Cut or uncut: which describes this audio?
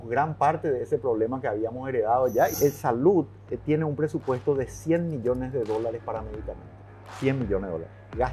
cut